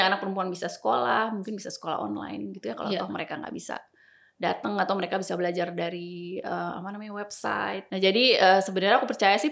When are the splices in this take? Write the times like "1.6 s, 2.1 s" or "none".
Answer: 7.8 s